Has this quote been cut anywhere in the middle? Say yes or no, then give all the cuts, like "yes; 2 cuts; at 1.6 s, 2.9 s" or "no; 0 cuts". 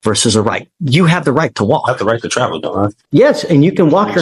yes; 1 cut; at 3.0 s